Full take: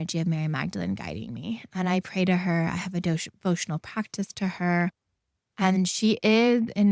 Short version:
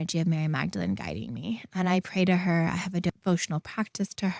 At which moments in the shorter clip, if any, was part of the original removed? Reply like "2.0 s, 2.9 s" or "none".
3.1 s